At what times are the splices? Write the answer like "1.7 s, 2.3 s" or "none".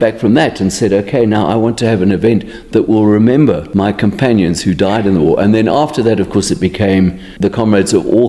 3.6 s, 7.2 s